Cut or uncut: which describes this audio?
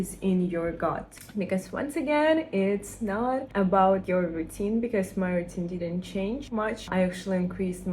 cut